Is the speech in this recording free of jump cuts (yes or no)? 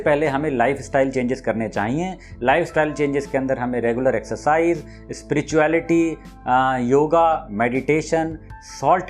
yes